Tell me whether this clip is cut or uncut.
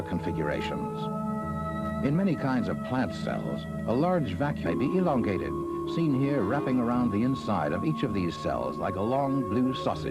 uncut